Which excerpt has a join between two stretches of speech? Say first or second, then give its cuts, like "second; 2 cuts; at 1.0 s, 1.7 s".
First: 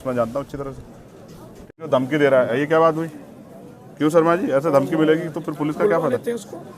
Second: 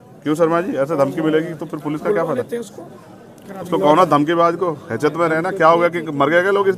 first; 1 cut; at 1.8 s